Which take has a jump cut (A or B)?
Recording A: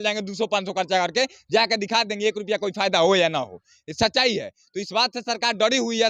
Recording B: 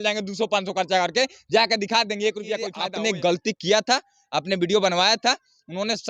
B